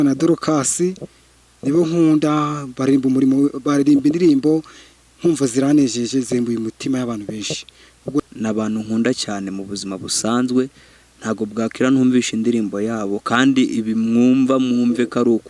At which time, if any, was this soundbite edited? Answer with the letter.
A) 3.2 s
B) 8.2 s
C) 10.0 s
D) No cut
B